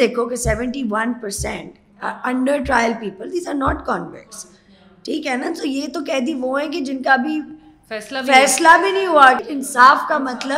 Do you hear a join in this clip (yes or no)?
yes